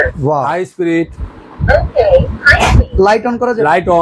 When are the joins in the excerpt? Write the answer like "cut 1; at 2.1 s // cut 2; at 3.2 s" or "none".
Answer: none